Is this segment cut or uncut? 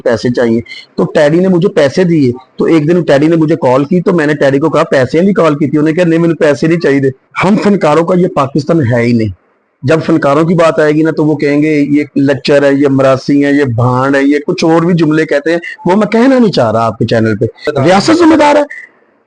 cut